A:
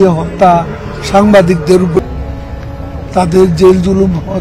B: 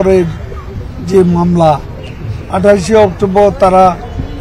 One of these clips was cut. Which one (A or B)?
A